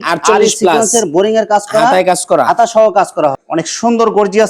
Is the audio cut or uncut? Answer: cut